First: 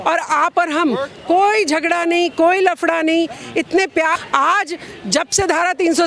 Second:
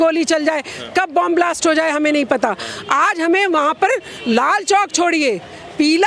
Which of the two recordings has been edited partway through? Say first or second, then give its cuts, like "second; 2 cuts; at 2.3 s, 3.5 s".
first; 1 cut; at 4.2 s